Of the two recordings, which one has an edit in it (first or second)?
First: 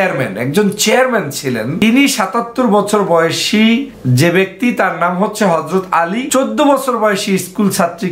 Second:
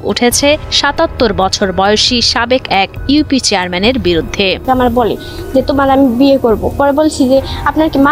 first